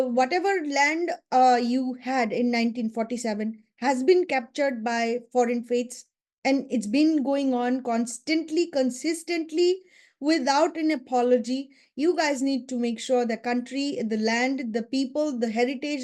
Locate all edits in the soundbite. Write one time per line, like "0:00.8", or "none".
none

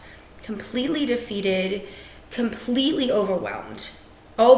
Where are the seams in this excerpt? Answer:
none

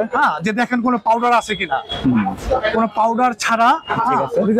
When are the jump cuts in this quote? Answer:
none

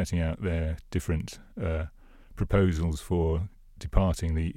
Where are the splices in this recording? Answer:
none

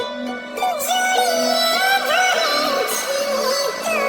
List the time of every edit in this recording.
none

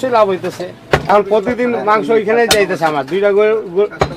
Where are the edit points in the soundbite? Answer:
0:01.1

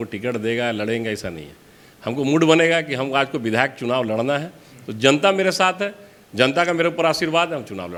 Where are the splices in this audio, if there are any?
none

